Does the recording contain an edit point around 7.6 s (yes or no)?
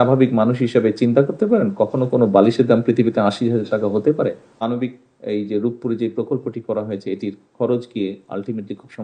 no